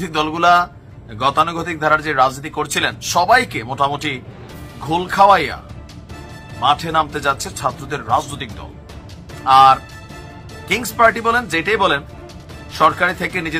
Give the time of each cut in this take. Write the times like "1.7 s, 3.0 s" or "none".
none